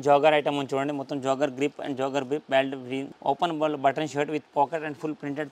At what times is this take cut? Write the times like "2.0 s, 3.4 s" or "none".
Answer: 3.1 s